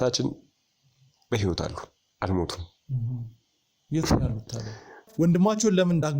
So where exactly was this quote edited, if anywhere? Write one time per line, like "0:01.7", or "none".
0:05.1